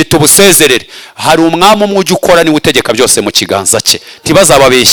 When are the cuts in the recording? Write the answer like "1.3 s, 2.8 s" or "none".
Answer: none